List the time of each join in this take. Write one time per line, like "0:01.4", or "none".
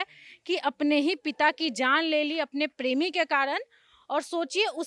none